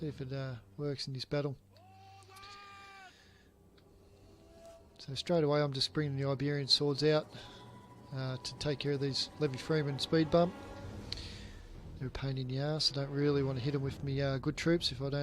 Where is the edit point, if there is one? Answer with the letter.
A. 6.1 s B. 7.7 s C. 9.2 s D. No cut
C